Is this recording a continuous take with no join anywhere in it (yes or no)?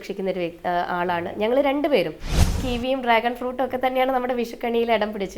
no